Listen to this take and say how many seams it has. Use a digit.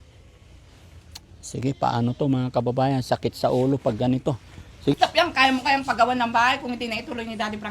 1